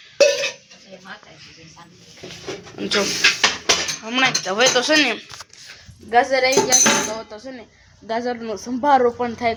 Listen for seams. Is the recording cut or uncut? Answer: uncut